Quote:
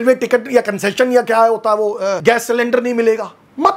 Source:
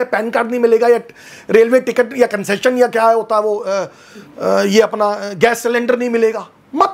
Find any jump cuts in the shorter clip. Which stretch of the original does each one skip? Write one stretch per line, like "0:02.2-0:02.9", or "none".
0:03.8-0:05.3